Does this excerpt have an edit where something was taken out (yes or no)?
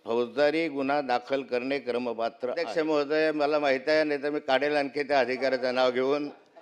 yes